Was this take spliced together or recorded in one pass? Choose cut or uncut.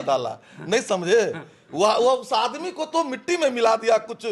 uncut